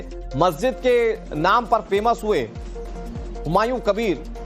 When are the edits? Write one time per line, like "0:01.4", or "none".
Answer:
0:01.0